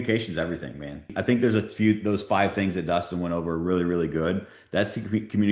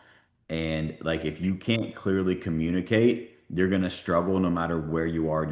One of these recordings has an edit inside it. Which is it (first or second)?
first